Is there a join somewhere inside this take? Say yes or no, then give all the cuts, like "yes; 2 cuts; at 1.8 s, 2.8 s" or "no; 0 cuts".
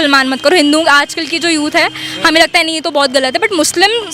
no; 0 cuts